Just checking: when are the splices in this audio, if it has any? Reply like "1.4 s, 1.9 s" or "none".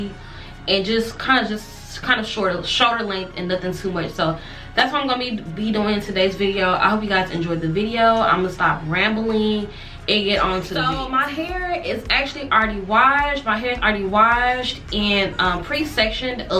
10.9 s